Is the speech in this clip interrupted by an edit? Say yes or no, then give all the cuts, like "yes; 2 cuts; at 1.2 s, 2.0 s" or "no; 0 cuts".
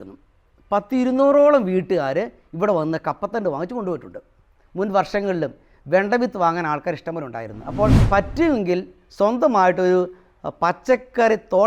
yes; 1 cut; at 8.0 s